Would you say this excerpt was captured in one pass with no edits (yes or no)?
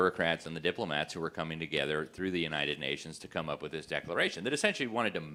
yes